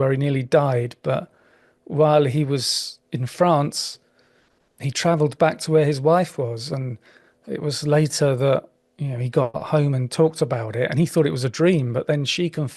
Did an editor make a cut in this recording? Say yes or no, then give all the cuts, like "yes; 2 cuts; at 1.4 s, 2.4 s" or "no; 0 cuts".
no; 0 cuts